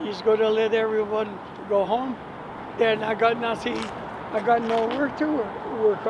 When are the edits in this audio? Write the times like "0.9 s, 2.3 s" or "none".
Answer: 2.7 s